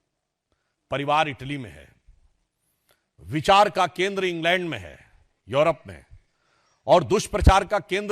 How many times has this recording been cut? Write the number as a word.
zero